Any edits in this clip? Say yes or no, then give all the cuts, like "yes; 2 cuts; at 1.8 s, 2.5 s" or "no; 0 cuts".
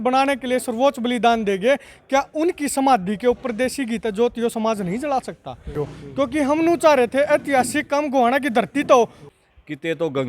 yes; 2 cuts; at 5.8 s, 9.2 s